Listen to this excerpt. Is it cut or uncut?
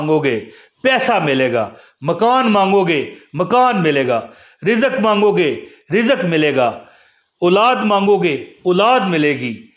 uncut